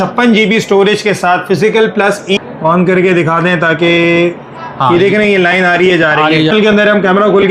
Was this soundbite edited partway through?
yes; 2 cuts; at 2.4 s, 6.5 s

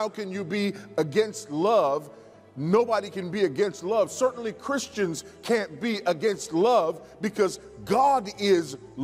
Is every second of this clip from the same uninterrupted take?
yes; 0 cuts

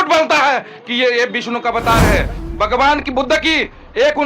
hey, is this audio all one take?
no; 1 cut; at 2.4 s

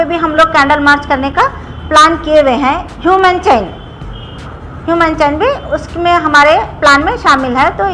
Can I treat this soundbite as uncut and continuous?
yes; 0 cuts

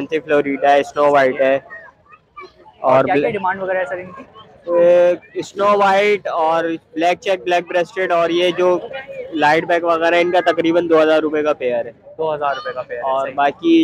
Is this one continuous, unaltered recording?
yes; 0 cuts

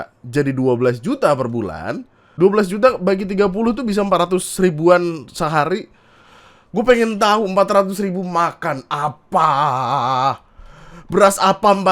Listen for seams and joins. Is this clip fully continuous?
no; 1 cut; at 2.2 s

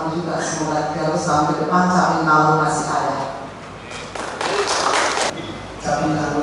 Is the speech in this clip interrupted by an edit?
yes; 1 cut; at 5.3 s

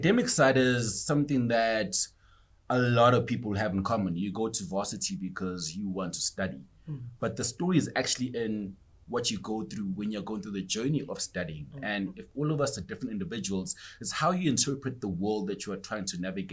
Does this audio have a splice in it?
no; 0 cuts

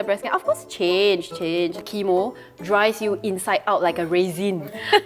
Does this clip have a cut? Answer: no; 0 cuts

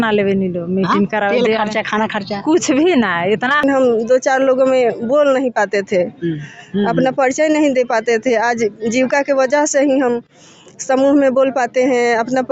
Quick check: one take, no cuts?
no; 1 cut; at 3.6 s

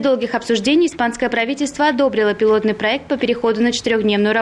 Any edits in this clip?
no; 0 cuts

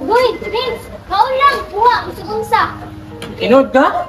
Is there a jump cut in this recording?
no; 0 cuts

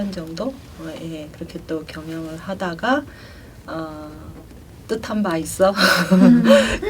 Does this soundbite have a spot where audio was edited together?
no; 0 cuts

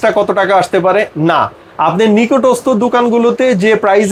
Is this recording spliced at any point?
no; 0 cuts

